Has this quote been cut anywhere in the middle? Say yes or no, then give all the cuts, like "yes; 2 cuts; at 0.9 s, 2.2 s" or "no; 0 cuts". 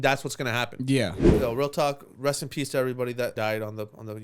yes; 2 cuts; at 1.2 s, 3.3 s